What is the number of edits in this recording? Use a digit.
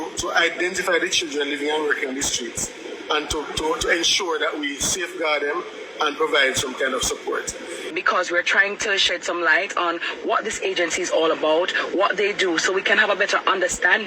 1